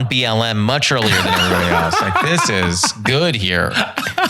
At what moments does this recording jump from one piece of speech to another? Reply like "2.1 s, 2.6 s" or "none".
none

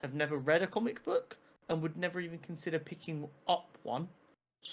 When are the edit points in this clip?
none

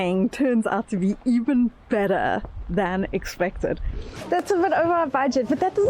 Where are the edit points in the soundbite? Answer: 4.1 s

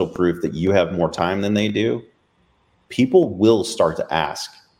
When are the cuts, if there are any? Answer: none

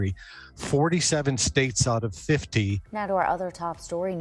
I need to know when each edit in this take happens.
2.9 s

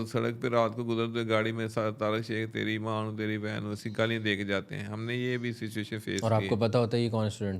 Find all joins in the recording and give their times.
none

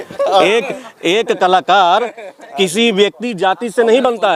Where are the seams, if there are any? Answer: none

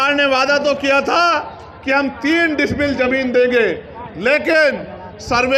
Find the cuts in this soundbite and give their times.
none

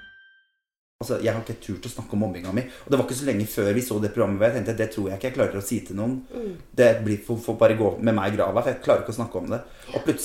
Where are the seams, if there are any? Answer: 1.0 s

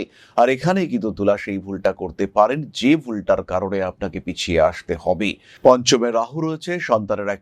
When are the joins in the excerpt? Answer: 5.5 s

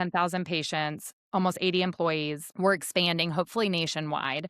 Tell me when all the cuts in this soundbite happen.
none

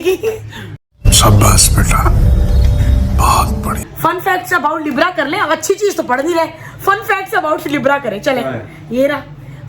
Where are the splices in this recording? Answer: 3.8 s

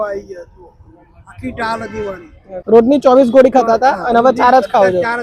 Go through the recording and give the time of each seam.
2.6 s

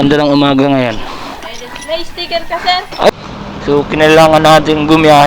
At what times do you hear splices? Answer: 3.1 s

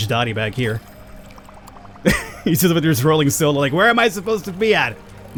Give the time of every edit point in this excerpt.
none

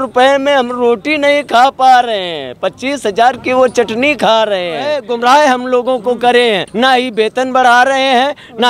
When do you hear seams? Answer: 5.0 s, 6.7 s

